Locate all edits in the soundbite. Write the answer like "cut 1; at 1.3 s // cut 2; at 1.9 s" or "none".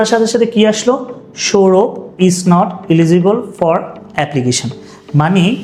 none